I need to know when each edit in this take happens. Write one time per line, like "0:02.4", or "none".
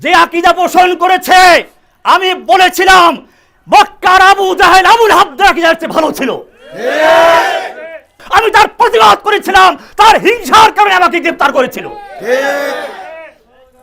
0:08.2